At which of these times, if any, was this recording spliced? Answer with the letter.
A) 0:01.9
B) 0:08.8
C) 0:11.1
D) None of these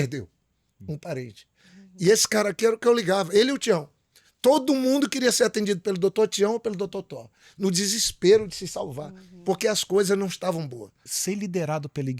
C